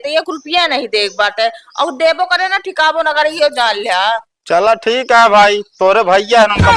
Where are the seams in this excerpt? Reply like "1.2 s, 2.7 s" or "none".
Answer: none